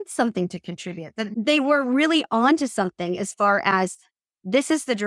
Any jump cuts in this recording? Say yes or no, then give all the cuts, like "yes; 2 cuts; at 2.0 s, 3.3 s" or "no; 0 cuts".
yes; 1 cut; at 1.3 s